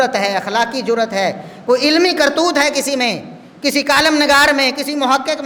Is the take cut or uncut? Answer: uncut